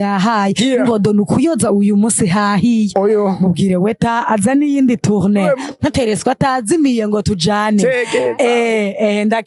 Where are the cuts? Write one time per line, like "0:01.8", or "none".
none